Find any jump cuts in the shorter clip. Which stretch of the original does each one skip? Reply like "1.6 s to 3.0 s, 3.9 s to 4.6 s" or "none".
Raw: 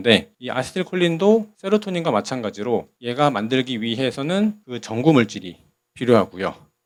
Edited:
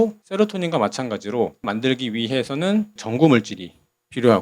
3.0 s to 3.4 s, 4.7 s to 4.8 s